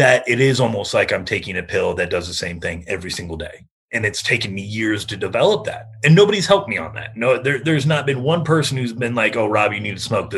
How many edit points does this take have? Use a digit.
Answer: 0